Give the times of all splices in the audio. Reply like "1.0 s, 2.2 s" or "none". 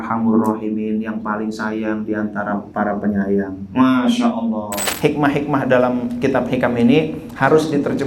4.8 s